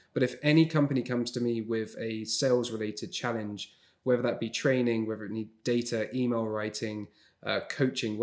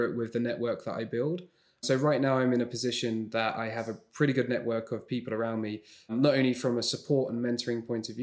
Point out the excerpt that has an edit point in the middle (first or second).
second